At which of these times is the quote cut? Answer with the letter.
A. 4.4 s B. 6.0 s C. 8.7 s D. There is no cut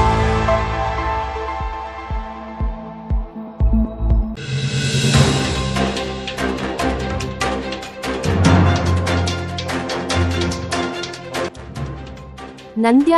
A